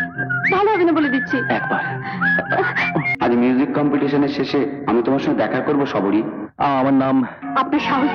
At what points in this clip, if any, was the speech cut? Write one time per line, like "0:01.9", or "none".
0:03.1